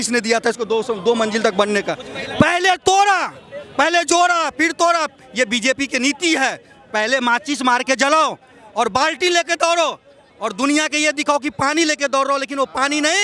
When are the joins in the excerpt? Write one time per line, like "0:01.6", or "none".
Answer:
0:02.0